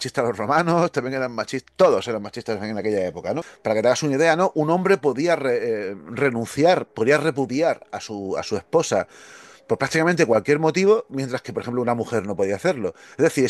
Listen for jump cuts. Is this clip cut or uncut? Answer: cut